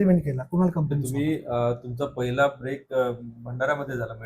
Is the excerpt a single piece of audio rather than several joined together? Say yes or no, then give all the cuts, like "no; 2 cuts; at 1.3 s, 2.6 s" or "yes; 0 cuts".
no; 1 cut; at 1.3 s